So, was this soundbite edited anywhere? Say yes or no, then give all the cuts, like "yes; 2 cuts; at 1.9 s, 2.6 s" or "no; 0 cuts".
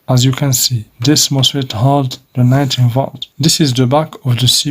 yes; 2 cuts; at 0.9 s, 3.2 s